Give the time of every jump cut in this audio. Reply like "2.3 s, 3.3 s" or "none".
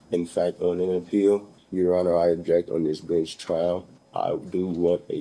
1.6 s, 4.0 s